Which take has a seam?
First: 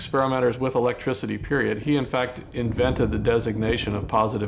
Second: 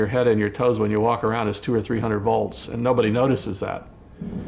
first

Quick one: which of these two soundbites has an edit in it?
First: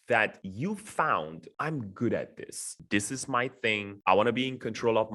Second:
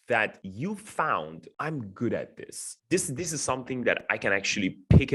first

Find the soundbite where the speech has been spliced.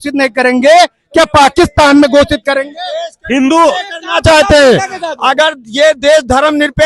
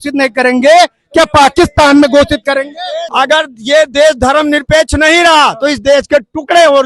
second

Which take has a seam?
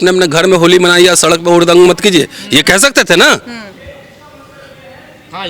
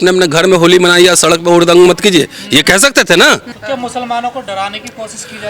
second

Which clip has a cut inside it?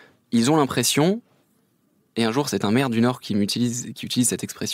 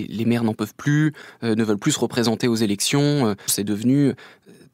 second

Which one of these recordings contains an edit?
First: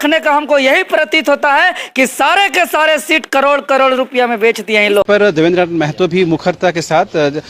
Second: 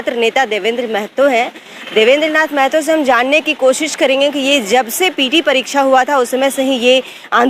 first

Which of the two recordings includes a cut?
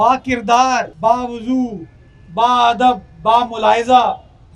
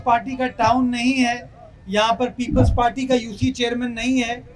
first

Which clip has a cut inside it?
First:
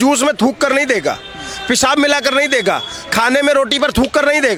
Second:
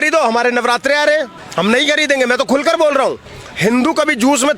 second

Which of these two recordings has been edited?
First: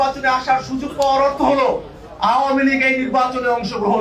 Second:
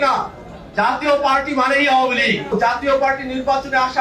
second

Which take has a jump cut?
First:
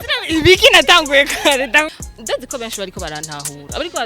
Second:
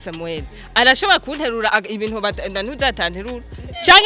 first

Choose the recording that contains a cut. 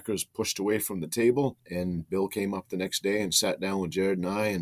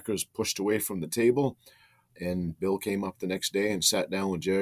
first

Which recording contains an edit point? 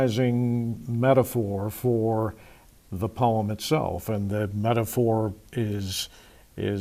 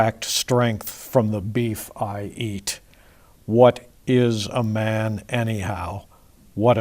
second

